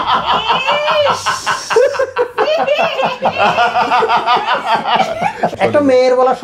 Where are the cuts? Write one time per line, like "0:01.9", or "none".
0:05.5